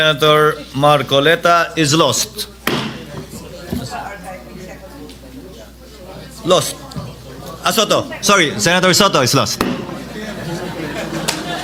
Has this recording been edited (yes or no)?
no